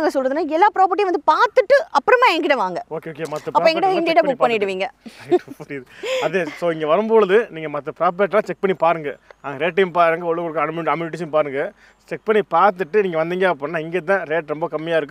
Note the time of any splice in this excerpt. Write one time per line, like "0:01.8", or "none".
none